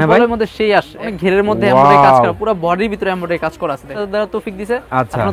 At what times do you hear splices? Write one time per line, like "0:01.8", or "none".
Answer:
0:01.1
0:03.9